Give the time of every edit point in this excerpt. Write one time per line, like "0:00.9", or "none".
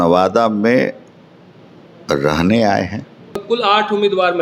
0:03.4